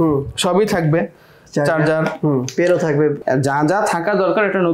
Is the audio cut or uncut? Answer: cut